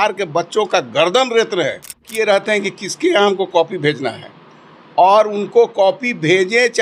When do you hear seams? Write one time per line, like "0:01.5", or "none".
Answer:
0:02.0